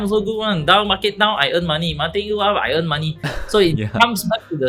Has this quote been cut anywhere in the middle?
no; 0 cuts

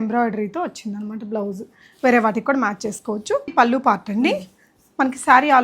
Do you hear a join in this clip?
yes; 1 cut; at 3.5 s

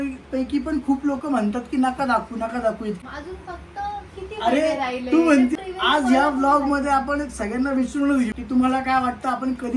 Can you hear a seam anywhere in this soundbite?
yes; 3 cuts; at 3.0 s, 5.5 s, 8.4 s

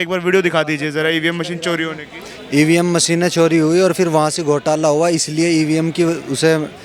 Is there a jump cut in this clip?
no; 0 cuts

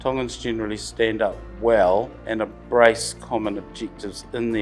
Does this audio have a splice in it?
yes; 2 cuts; at 1.5 s, 2.2 s

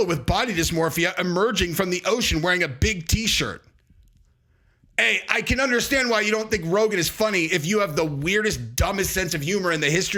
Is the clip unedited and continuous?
yes; 0 cuts

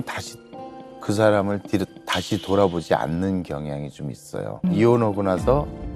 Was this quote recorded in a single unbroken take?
no; 1 cut; at 4.6 s

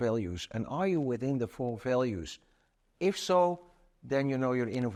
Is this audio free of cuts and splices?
yes; 0 cuts

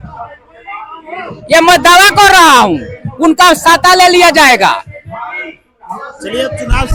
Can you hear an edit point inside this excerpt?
no; 0 cuts

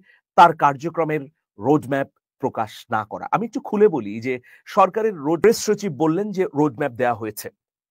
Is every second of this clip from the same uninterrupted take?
no; 1 cut; at 5.4 s

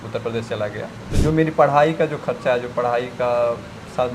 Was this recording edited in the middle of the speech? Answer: yes; 1 cut; at 1.0 s

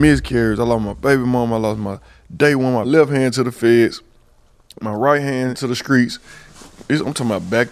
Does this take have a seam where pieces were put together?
yes; 2 cuts; at 2.9 s, 5.7 s

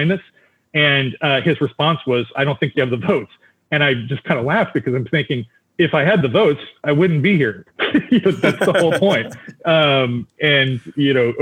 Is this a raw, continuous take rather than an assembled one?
yes; 0 cuts

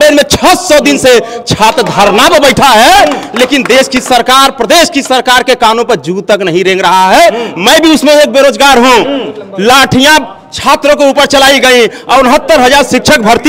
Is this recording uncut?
yes; 0 cuts

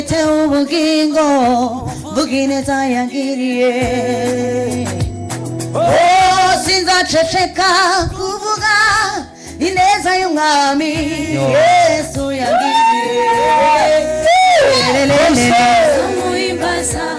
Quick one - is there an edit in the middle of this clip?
no; 0 cuts

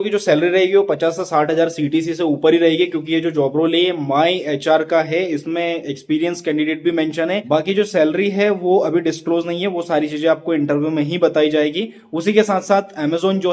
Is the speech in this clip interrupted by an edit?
no; 0 cuts

